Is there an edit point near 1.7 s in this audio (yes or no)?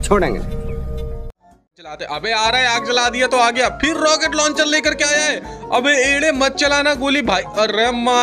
yes